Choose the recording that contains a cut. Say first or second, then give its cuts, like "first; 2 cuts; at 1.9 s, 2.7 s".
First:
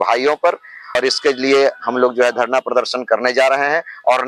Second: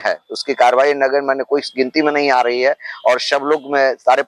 first; 1 cut; at 0.9 s